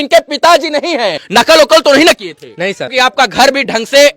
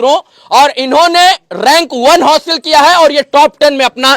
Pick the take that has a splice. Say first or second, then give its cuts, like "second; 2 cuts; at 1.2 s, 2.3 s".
first; 2 cuts; at 1.2 s, 2.9 s